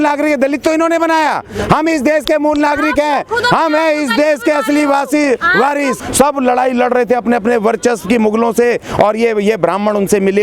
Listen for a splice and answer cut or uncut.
cut